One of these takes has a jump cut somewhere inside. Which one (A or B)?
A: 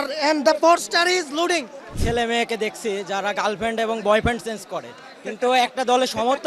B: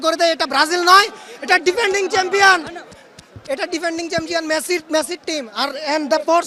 A